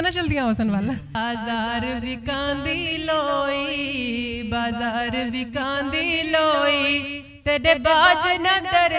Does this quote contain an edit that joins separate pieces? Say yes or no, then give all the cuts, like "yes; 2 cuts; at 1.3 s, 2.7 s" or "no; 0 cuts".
yes; 1 cut; at 1.1 s